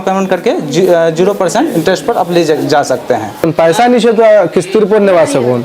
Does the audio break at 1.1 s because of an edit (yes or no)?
no